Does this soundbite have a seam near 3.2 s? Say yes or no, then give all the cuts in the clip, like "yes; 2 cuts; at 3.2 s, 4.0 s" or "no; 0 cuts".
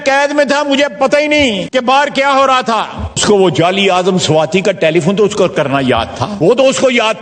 yes; 3 cuts; at 1.6 s, 3.2 s, 6.3 s